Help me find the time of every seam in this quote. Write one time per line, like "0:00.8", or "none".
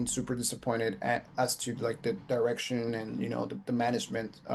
none

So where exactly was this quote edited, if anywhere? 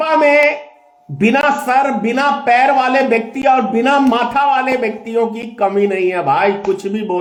none

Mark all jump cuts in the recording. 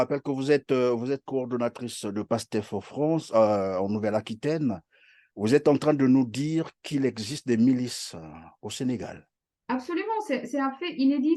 none

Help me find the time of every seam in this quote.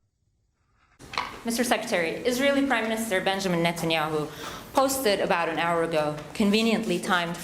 0:01.0

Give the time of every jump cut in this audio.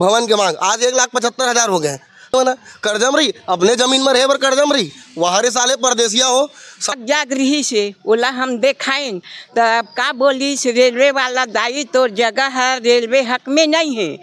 0:02.3
0:06.9

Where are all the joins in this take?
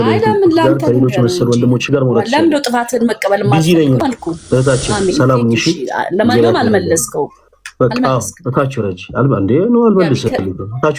0:04.0

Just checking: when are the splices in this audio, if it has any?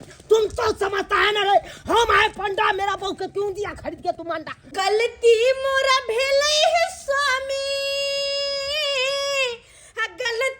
0:04.7

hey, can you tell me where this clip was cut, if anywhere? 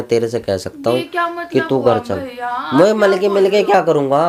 none

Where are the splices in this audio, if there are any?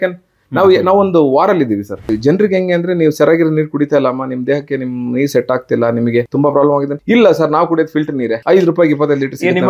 0:02.0
0:06.8
0:08.4

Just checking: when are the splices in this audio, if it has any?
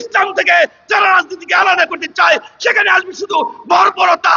none

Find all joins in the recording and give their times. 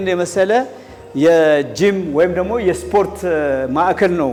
none

